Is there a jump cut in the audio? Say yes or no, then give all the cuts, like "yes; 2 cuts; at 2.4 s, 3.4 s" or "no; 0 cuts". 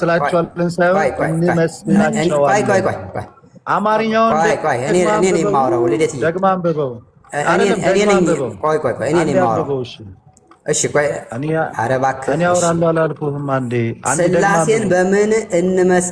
no; 0 cuts